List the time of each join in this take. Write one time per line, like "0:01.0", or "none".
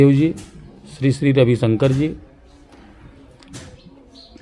none